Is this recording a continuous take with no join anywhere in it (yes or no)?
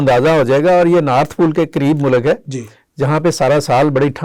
yes